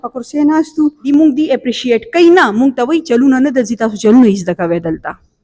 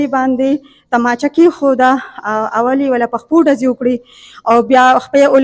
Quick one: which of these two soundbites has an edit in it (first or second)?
first